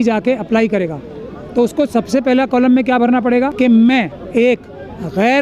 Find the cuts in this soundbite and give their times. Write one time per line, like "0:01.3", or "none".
0:03.5
0:04.2